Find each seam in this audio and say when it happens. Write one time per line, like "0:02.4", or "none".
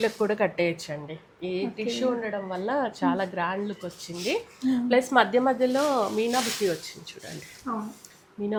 none